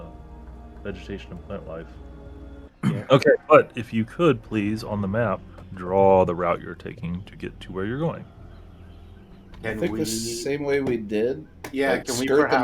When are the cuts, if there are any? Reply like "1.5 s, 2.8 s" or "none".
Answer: 2.6 s